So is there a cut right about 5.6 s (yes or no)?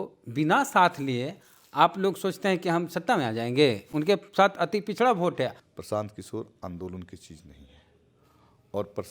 yes